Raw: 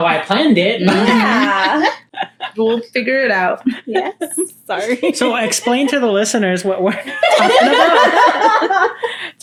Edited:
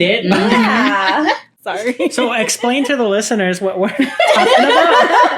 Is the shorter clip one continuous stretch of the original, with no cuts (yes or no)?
no